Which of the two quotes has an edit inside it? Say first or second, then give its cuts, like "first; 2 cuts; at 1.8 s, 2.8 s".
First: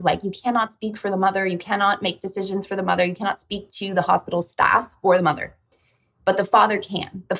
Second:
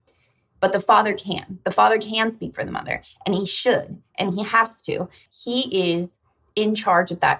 second; 1 cut; at 5.2 s